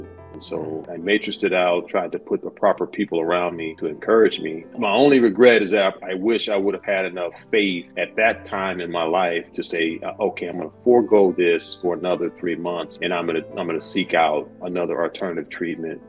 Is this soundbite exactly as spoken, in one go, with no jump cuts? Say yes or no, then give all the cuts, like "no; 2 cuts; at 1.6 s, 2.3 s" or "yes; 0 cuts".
yes; 0 cuts